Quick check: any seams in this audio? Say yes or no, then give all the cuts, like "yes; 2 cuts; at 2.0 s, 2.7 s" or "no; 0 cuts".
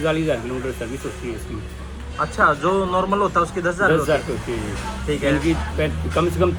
no; 0 cuts